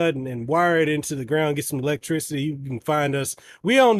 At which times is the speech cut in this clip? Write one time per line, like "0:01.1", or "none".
none